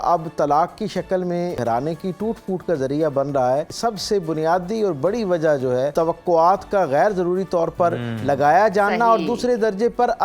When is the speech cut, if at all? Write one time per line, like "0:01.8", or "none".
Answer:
0:01.6
0:03.7
0:05.9

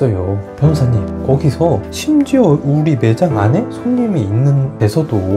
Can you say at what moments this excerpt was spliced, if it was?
0:01.0

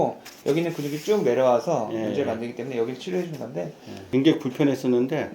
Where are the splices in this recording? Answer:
0:04.1

